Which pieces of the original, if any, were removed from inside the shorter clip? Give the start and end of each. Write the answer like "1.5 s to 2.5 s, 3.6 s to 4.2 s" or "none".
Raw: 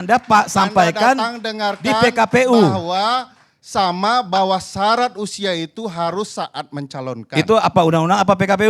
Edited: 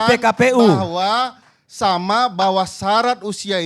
none